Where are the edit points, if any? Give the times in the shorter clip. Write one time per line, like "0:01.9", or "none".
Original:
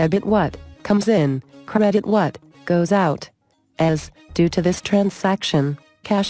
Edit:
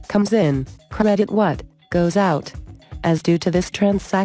0:02.9